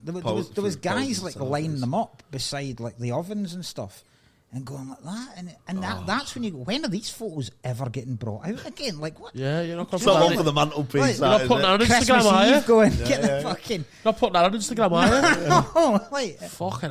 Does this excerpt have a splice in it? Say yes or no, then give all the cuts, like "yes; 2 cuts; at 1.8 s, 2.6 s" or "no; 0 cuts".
no; 0 cuts